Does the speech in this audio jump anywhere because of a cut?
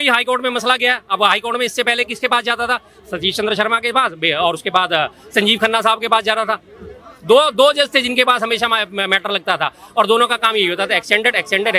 no; 0 cuts

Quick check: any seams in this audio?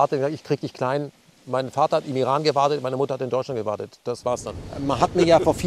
yes; 1 cut; at 4.6 s

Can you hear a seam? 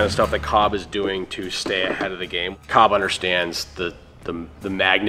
yes; 1 cut; at 2.7 s

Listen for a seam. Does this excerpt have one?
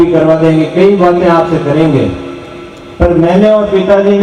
no; 0 cuts

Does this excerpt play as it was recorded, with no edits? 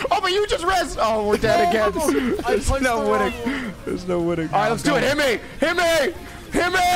no; 2 cuts; at 2.4 s, 4.5 s

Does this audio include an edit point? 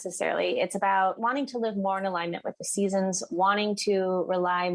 no; 0 cuts

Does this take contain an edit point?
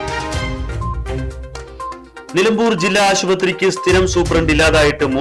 no; 0 cuts

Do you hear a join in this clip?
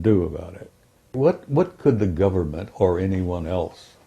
yes; 1 cut; at 1.1 s

